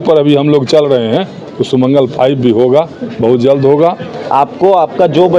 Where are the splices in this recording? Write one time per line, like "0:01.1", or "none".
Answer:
0:04.1